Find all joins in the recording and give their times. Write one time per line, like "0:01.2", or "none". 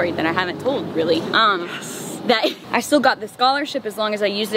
0:02.6